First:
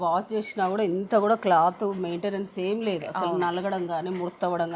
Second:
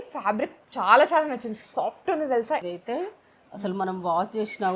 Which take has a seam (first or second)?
second